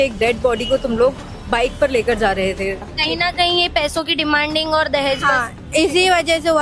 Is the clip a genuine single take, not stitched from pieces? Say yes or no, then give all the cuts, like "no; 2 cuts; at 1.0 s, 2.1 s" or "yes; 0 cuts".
no; 1 cut; at 2.8 s